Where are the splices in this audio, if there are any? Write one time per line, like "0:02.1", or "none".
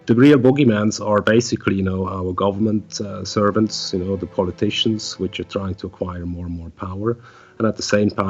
none